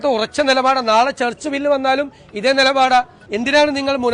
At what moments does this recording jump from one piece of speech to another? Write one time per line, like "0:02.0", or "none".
0:03.2